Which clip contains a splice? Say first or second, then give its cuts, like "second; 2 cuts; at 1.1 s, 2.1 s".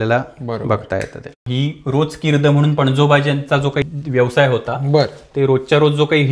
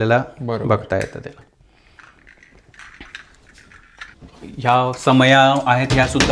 first; 2 cuts; at 1.4 s, 3.8 s